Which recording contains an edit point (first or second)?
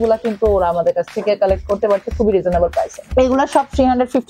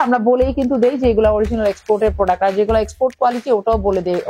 first